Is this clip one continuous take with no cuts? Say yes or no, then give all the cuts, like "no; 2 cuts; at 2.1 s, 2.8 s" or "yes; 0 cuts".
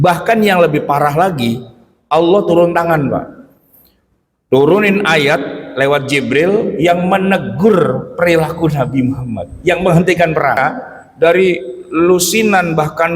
no; 1 cut; at 10.6 s